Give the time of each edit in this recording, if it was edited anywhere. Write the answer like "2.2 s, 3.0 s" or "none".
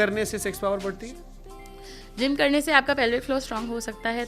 none